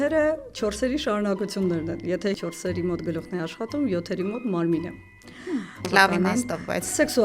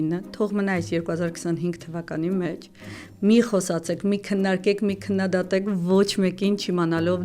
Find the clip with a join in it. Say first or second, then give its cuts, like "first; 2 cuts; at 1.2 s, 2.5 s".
first; 2 cuts; at 2.4 s, 5.9 s